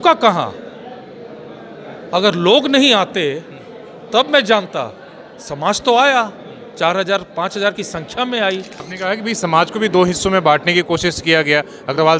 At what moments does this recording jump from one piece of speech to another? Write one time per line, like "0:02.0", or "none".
0:08.8